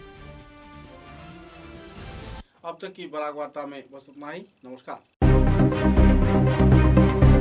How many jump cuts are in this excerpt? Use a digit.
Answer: 0